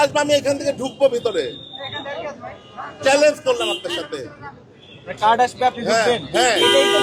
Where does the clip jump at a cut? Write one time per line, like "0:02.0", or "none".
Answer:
none